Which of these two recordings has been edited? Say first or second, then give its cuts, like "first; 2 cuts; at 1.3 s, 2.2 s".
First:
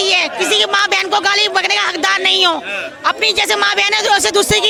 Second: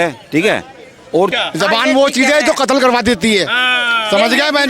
second; 1 cut; at 1.3 s